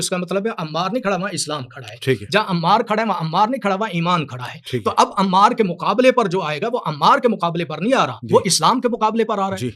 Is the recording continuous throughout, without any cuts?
yes; 0 cuts

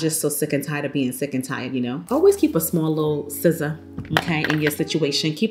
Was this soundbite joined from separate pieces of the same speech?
yes; 1 cut; at 2.0 s

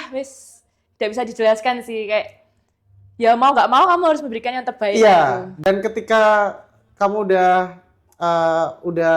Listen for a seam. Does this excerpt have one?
no; 0 cuts

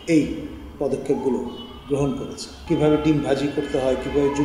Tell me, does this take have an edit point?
yes; 1 cut; at 2.5 s

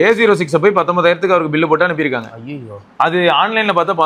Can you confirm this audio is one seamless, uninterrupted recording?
yes; 0 cuts

